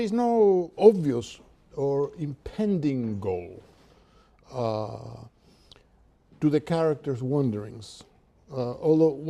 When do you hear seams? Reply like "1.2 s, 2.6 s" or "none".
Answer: 8.1 s